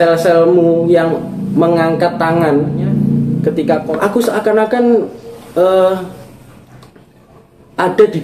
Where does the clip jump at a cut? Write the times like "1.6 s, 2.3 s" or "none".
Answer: 3.9 s